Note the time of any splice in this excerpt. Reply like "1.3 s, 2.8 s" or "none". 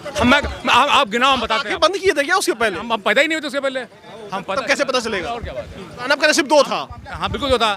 6.1 s